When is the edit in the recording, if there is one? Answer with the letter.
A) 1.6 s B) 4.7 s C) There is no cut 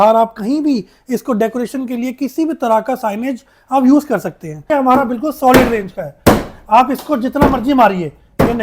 B